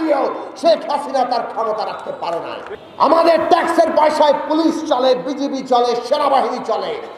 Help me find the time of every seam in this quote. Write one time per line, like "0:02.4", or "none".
0:02.7